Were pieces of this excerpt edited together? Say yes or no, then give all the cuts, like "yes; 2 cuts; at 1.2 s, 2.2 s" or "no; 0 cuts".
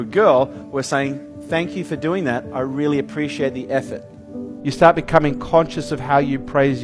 yes; 1 cut; at 4.5 s